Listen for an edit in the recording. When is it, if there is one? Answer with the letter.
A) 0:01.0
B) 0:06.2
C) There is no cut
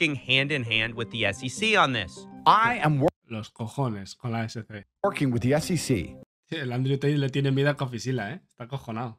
B